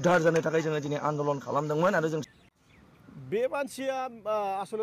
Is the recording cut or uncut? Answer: cut